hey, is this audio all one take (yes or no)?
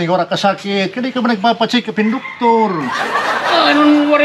yes